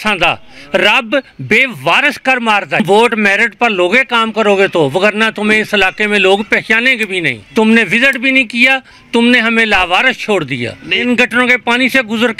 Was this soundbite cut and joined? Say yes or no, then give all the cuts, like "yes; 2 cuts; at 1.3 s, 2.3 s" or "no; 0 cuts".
yes; 3 cuts; at 2.8 s, 7.4 s, 10.9 s